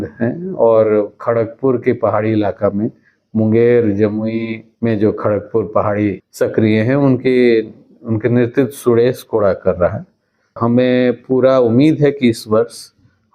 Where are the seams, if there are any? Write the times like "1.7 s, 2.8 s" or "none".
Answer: 4.6 s, 6.2 s, 10.6 s